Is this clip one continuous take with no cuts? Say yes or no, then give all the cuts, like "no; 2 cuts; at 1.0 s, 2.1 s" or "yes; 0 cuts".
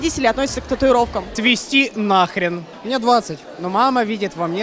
no; 2 cuts; at 1.3 s, 2.8 s